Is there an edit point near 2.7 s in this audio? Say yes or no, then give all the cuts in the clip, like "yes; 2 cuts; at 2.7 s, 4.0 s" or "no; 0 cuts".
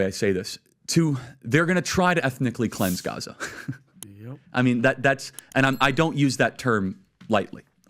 no; 0 cuts